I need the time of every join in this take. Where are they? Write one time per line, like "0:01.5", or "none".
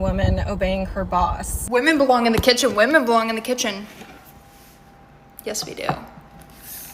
0:01.5